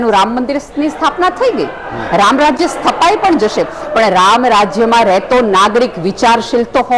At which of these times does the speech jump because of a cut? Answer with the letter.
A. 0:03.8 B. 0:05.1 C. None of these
C